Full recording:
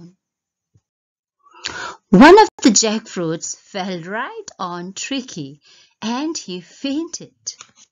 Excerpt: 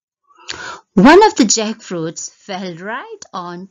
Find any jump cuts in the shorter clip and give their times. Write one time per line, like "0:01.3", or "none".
0:01.3